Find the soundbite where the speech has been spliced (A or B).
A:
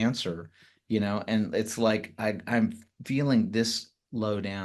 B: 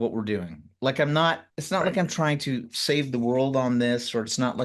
B